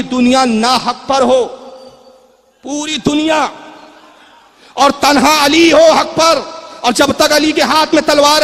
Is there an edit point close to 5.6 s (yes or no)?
no